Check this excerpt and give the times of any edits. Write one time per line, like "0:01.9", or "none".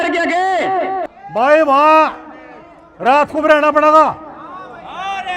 0:01.1